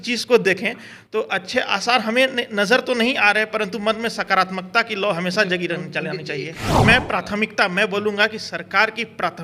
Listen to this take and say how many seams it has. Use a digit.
1